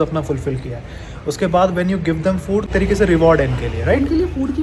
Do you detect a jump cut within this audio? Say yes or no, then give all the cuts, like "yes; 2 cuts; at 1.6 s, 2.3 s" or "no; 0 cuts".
yes; 1 cut; at 2.7 s